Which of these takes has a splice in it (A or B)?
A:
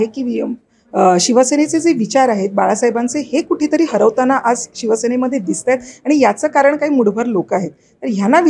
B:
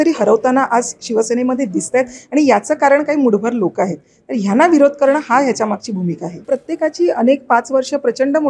B